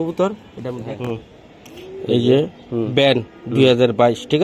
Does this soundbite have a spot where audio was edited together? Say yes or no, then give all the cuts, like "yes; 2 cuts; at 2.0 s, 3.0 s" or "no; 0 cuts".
yes; 1 cut; at 0.9 s